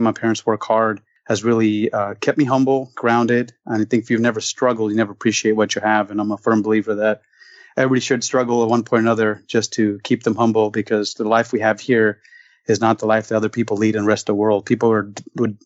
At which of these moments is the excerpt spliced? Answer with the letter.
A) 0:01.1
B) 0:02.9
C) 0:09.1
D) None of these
A